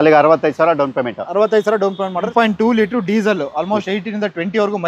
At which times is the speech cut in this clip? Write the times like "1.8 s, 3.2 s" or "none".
2.3 s